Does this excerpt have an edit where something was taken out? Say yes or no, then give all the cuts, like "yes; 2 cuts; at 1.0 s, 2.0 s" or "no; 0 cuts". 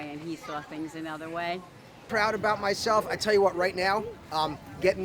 yes; 1 cut; at 2.0 s